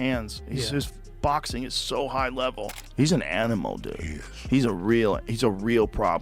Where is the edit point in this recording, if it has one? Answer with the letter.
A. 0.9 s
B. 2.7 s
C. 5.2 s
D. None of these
B